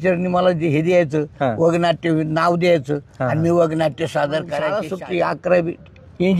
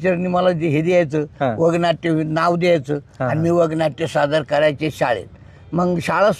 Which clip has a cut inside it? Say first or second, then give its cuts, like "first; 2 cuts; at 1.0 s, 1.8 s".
first; 1 cut; at 4.8 s